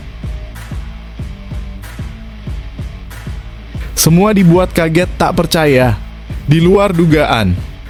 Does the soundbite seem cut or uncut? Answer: uncut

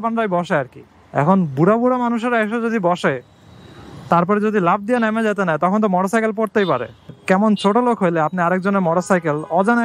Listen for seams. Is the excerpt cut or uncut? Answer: uncut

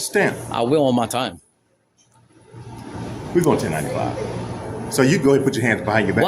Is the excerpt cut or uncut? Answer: uncut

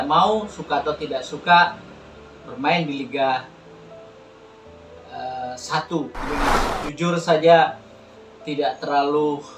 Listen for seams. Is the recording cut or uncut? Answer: cut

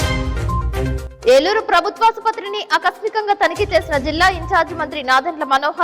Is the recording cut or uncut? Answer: cut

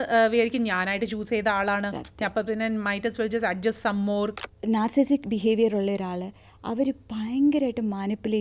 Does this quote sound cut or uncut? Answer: cut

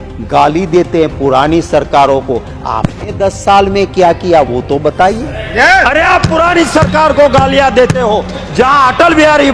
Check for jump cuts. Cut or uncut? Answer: uncut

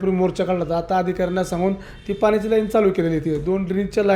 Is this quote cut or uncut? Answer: uncut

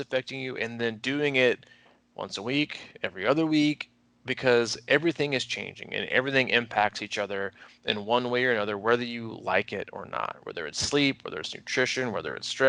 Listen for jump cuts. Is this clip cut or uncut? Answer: uncut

